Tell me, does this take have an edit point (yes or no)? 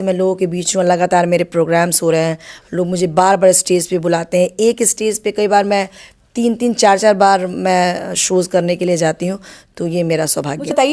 no